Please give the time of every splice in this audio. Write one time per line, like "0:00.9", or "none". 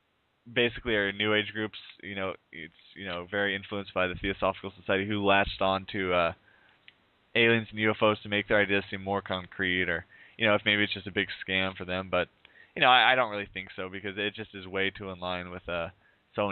0:08.2